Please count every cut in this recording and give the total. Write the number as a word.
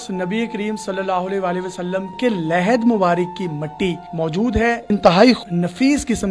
three